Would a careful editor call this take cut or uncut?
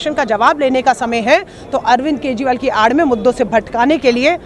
uncut